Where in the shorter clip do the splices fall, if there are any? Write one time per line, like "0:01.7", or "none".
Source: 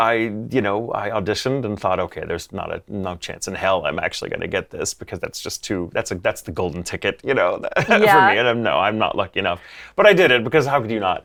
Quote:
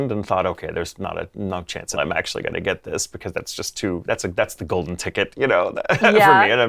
0:02.0